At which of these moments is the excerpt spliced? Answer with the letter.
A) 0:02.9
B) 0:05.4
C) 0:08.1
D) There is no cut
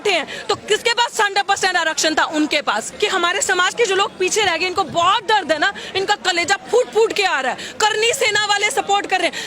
A